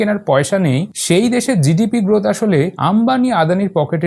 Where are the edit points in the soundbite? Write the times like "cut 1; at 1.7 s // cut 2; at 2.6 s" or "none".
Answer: cut 1; at 0.9 s // cut 2; at 2.8 s